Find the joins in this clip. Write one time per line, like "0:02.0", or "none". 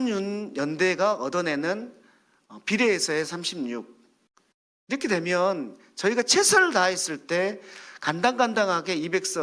none